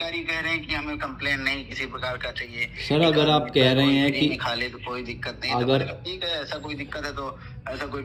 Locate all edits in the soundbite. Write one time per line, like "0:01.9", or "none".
none